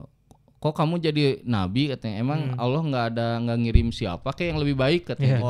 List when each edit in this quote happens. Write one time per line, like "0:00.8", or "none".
none